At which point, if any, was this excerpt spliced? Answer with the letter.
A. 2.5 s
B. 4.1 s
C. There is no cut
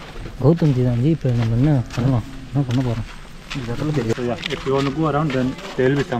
B